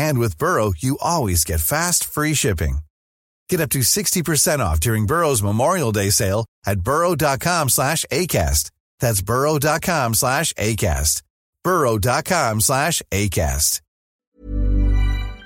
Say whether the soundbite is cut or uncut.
cut